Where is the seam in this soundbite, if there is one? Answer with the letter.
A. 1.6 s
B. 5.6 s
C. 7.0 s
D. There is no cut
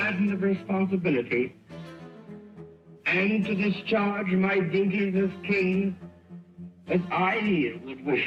D